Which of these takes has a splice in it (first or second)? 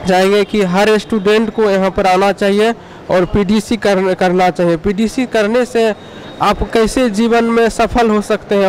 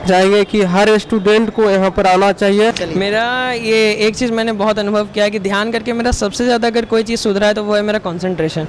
second